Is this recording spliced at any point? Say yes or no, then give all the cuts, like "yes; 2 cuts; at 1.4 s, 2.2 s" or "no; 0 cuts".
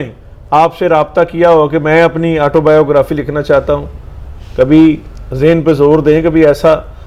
no; 0 cuts